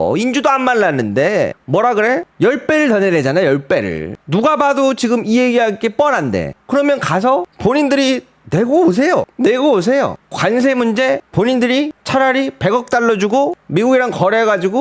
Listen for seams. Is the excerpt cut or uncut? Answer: uncut